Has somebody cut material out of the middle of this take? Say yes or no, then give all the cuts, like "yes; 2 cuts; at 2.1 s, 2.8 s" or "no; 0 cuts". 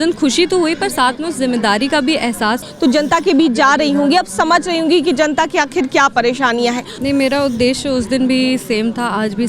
yes; 2 cuts; at 2.7 s, 6.9 s